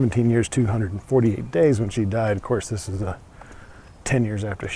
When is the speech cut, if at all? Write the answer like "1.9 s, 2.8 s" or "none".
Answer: none